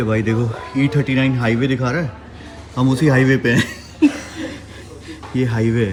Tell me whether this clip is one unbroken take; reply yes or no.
yes